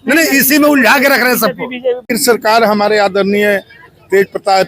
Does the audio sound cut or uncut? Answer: cut